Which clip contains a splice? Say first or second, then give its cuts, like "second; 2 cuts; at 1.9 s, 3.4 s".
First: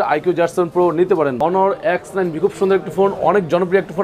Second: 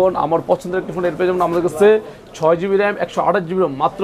first; 1 cut; at 1.3 s